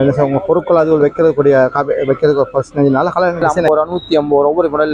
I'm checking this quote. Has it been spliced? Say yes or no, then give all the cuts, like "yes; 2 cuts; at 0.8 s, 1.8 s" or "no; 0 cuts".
yes; 1 cut; at 3.5 s